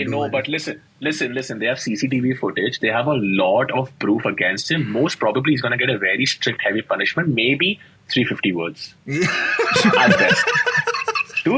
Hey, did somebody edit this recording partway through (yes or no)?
no